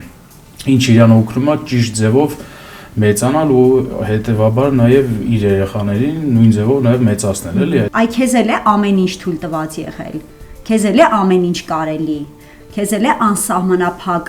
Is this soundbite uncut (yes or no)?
no